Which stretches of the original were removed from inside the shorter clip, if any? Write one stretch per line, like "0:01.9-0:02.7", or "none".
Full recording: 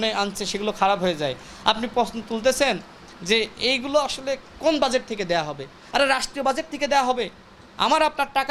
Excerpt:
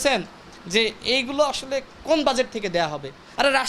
none